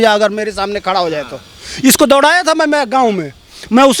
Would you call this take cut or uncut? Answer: uncut